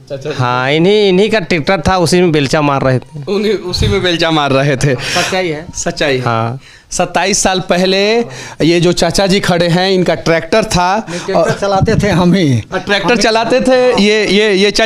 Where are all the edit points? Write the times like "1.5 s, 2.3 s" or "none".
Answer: none

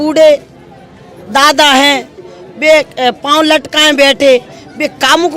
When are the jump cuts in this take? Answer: none

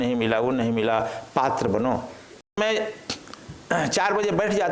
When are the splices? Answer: 2.6 s

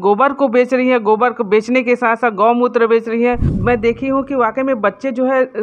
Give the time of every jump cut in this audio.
3.5 s

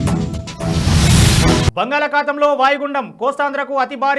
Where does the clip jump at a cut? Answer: 1.7 s

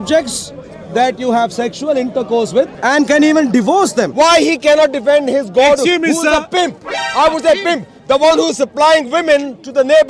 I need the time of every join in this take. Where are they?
2.7 s, 4.1 s

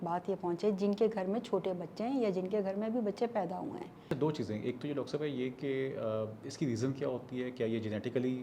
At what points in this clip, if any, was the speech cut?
4.0 s

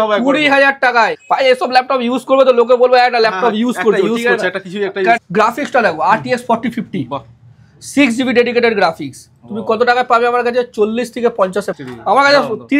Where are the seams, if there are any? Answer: 1.2 s, 5.2 s, 11.8 s

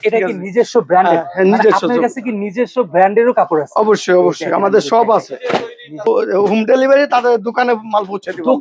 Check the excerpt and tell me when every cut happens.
6.0 s

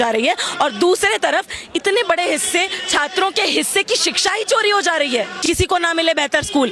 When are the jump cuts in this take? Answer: 5.3 s

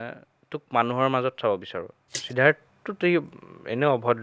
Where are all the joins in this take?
2.2 s

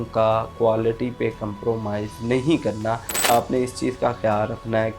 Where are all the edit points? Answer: 3.3 s

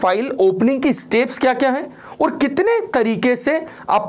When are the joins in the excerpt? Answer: none

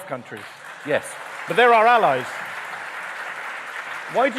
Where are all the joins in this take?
none

